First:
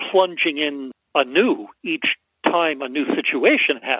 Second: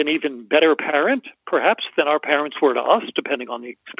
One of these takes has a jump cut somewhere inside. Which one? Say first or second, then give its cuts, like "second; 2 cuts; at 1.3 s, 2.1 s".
first; 1 cut; at 0.9 s